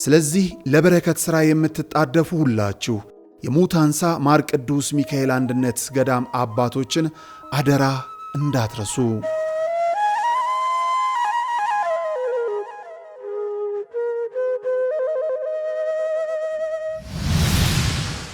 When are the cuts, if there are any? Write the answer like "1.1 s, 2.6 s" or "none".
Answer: 17.1 s